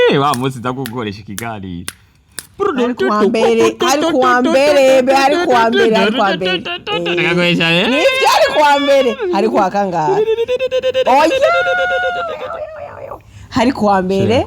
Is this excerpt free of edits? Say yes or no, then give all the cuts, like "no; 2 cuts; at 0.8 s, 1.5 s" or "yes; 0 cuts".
yes; 0 cuts